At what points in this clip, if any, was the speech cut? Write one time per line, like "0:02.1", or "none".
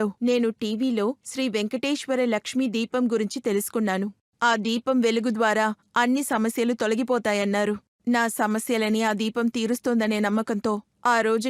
none